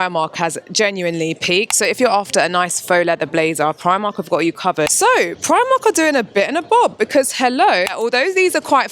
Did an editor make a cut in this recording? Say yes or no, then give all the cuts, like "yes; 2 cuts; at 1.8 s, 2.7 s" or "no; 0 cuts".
yes; 3 cuts; at 1.7 s, 4.9 s, 7.9 s